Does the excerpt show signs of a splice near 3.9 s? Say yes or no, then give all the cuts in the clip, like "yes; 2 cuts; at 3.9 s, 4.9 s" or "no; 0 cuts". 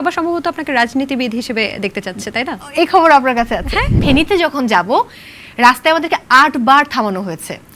yes; 1 cut; at 3.9 s